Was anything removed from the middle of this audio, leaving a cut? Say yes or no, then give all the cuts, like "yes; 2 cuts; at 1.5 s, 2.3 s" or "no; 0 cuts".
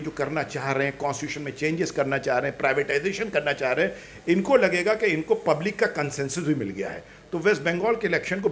no; 0 cuts